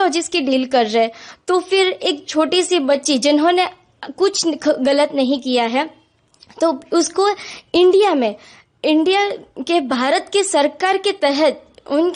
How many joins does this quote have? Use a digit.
0